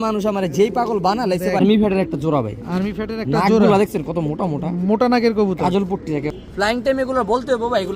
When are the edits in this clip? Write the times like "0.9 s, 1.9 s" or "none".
1.6 s, 6.3 s